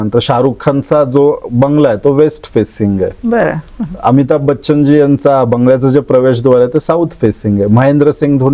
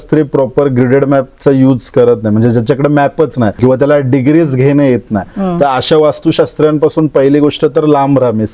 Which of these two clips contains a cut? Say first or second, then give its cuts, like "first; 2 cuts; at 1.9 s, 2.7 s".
second; 1 cut; at 3.6 s